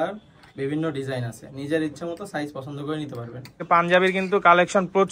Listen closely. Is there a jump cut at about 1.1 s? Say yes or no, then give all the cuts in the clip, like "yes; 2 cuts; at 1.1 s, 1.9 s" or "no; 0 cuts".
no; 1 cut; at 3.6 s